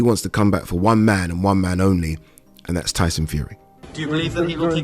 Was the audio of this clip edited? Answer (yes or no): yes